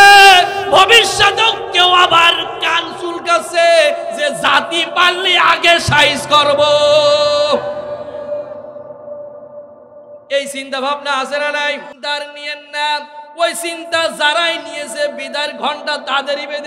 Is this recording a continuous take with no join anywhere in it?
yes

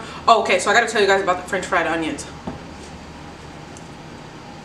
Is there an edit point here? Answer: no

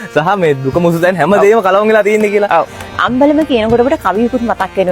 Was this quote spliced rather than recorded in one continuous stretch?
yes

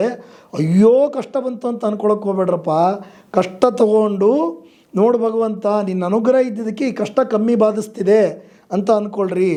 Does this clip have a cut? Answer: no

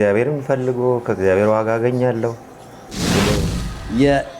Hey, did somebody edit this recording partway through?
yes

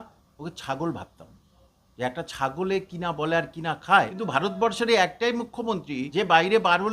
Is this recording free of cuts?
no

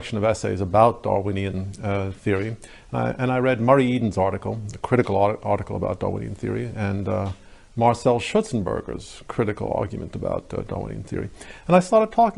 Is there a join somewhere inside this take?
yes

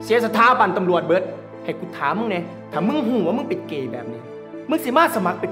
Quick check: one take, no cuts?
no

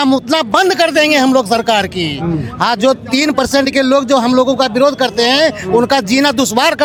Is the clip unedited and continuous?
yes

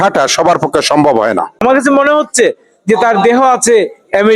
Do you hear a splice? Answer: yes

